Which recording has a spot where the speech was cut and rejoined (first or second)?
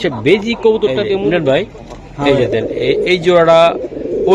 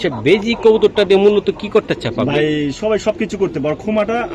first